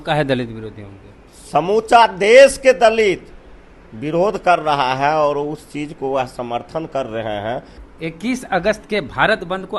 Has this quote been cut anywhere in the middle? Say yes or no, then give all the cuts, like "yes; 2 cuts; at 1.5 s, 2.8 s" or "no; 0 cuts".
yes; 1 cut; at 7.7 s